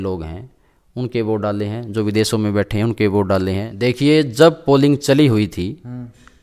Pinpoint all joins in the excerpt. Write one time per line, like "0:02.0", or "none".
0:03.7

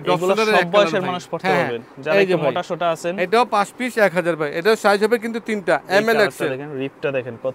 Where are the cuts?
none

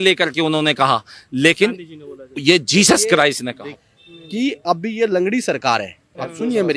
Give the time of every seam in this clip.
0:03.8

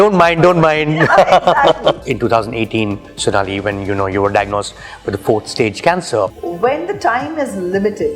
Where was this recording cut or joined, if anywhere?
0:02.0
0:06.4

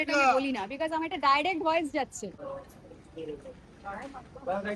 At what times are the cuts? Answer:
none

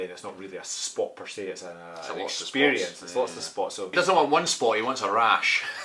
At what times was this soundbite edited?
0:03.9

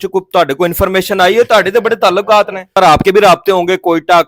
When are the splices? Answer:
0:02.7

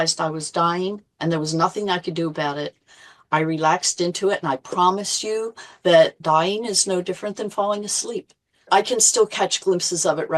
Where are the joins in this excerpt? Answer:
0:06.2
0:08.7

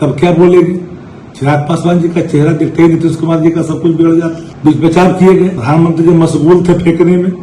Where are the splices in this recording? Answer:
0:04.5
0:05.6

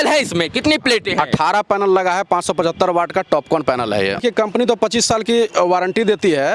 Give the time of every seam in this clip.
0:04.2

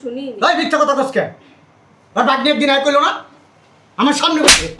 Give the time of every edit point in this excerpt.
none

